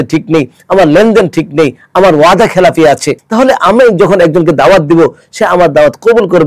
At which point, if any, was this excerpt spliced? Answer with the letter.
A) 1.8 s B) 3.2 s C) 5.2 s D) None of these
B